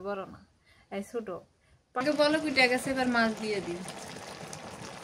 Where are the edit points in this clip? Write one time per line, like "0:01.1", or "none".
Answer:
0:02.0